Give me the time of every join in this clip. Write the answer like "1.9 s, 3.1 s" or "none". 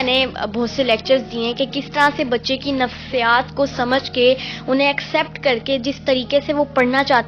none